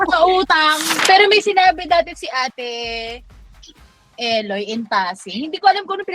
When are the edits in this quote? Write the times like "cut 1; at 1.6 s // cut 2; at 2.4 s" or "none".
cut 1; at 1.0 s